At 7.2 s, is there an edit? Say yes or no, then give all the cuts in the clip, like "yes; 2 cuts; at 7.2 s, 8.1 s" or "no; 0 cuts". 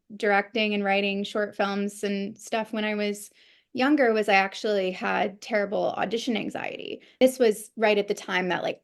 yes; 1 cut; at 7.2 s